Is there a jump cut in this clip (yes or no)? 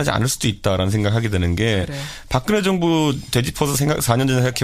yes